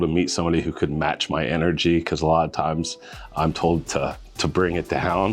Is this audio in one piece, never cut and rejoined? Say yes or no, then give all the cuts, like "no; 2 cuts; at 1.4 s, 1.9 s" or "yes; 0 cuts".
yes; 0 cuts